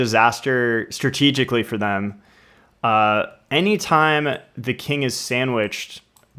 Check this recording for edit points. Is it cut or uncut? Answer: uncut